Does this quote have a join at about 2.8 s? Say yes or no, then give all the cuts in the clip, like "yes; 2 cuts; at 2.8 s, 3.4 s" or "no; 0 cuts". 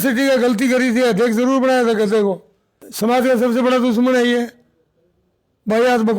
yes; 1 cut; at 2.8 s